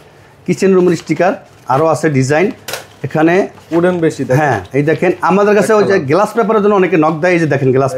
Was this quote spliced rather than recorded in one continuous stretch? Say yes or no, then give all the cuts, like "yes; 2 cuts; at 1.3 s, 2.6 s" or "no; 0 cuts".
no; 0 cuts